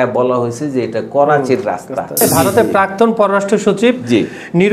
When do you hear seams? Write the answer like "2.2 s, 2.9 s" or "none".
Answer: 2.2 s